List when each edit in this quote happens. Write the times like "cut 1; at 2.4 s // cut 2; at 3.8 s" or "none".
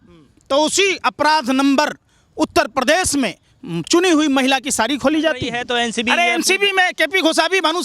cut 1; at 5.5 s